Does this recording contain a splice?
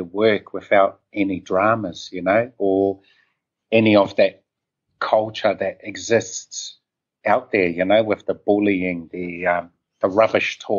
no; 0 cuts

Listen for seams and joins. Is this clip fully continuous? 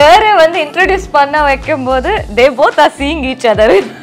yes; 0 cuts

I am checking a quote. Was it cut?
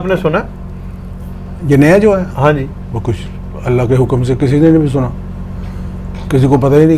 no; 0 cuts

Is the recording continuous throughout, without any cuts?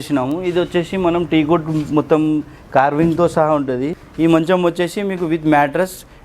no; 1 cut; at 4.0 s

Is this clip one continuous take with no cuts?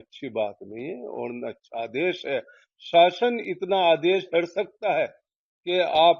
yes; 0 cuts

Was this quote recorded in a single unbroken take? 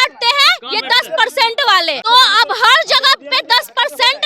no; 1 cut; at 2.0 s

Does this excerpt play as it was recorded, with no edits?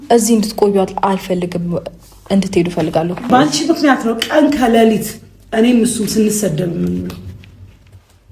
no; 1 cut; at 3.3 s

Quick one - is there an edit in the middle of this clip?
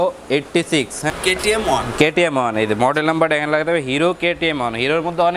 yes; 1 cut; at 1.1 s

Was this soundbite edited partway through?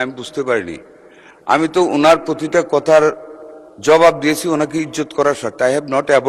no; 0 cuts

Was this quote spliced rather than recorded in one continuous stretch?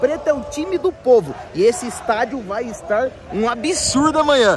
no; 0 cuts

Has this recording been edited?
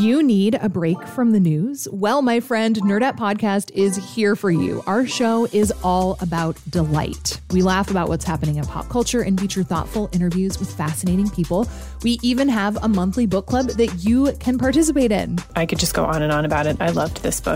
no; 0 cuts

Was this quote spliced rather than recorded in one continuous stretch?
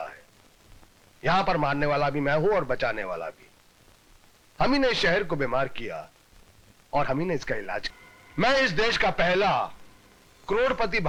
no; 0 cuts

